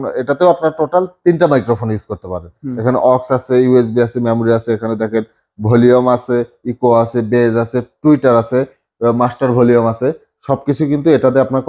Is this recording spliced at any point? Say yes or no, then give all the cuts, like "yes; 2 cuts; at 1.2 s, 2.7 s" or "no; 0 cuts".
no; 0 cuts